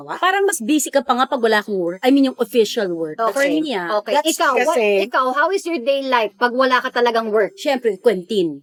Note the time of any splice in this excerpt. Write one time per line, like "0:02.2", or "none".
none